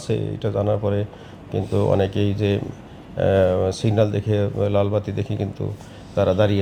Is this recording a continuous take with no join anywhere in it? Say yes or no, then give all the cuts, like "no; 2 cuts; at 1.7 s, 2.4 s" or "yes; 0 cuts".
yes; 0 cuts